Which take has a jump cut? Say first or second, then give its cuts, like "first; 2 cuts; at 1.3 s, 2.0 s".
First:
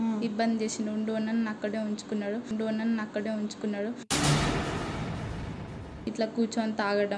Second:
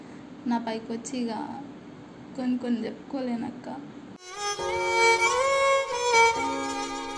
first; 1 cut; at 5.9 s